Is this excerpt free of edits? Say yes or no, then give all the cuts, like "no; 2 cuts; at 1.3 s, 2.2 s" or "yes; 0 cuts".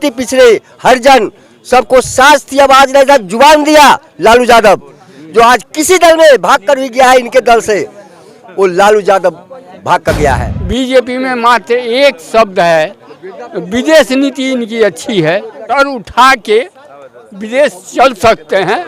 no; 2 cuts; at 10.5 s, 15.6 s